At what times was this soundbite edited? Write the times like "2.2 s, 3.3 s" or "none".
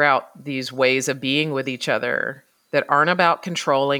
none